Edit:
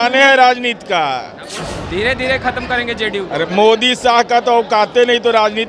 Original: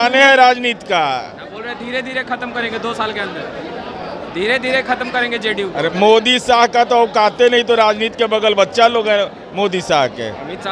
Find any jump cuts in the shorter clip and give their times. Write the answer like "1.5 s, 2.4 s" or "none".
1.5 s